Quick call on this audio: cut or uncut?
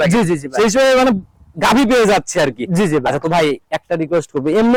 uncut